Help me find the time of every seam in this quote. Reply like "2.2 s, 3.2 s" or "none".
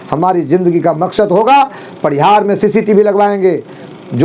none